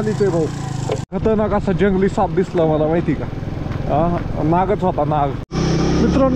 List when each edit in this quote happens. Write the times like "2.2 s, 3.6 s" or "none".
1.0 s, 5.5 s